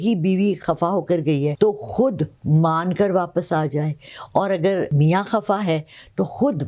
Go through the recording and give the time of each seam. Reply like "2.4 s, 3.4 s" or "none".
1.5 s, 4.9 s

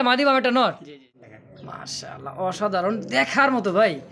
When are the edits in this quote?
1.2 s

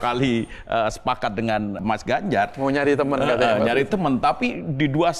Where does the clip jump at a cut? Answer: 1.8 s

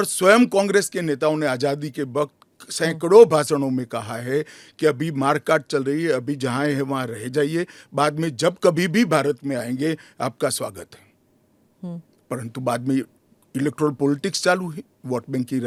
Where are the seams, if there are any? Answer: none

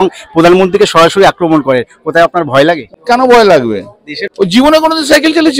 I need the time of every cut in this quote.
2.9 s, 4.2 s

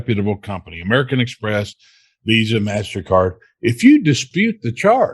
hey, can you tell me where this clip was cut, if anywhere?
4.3 s

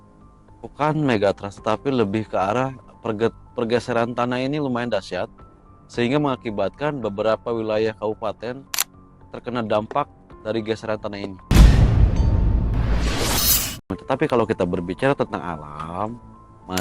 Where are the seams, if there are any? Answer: 11.4 s, 14.0 s

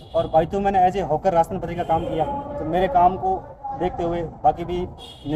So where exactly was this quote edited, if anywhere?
none

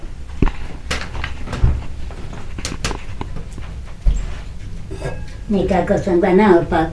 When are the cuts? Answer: none

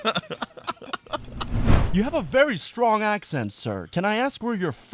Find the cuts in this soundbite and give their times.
1.7 s

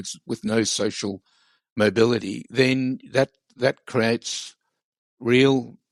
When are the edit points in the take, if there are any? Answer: none

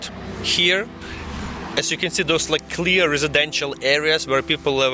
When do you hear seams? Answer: none

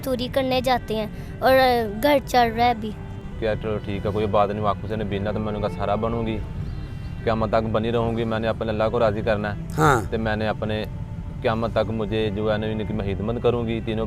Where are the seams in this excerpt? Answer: 3.3 s

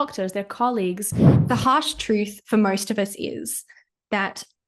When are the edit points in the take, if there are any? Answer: 1.3 s

